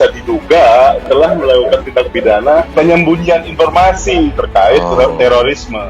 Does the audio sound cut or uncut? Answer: cut